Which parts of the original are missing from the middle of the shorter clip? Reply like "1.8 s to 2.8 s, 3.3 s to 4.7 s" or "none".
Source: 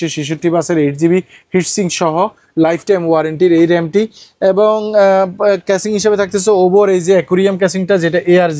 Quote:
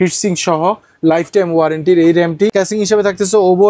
4.1 s to 5.7 s